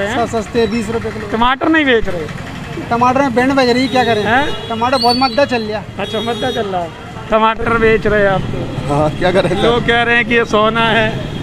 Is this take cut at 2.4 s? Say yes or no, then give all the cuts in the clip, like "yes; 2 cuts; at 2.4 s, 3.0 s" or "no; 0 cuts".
no; 1 cut; at 7.6 s